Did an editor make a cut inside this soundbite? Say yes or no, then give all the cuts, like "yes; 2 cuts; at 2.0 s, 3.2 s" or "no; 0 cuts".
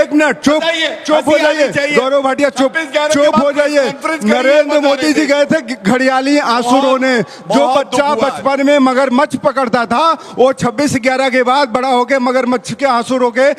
no; 0 cuts